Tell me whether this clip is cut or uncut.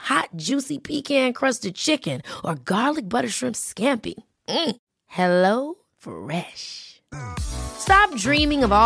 uncut